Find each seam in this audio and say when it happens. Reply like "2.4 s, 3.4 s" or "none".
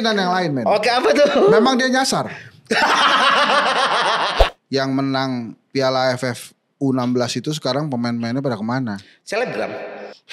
4.4 s